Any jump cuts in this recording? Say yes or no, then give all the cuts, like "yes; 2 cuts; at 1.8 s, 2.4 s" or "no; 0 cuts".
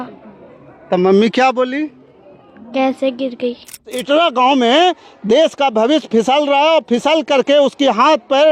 yes; 1 cut; at 4.0 s